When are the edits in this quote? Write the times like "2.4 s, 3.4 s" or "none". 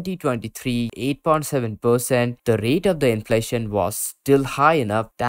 0.9 s, 2.4 s